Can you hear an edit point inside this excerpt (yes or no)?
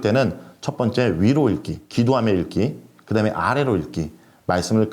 yes